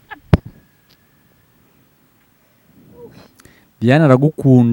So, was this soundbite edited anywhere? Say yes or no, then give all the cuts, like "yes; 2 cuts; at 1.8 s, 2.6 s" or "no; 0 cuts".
no; 0 cuts